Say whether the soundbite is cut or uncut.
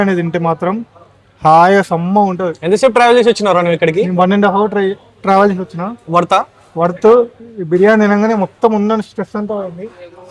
uncut